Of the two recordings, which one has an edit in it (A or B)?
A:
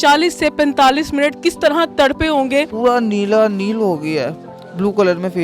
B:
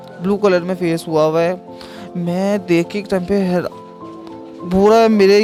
A